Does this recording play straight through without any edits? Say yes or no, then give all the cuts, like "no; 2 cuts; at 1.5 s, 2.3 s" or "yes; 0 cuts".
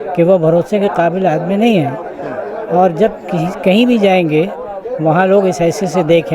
yes; 0 cuts